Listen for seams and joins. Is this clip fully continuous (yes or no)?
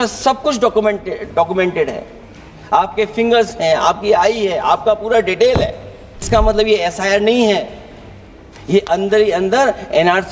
no